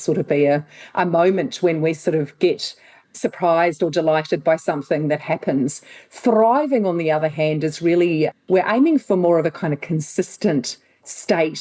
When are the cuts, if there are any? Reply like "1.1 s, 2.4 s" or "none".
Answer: 3.2 s